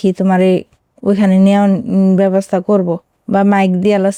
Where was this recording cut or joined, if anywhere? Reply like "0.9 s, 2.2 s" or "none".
none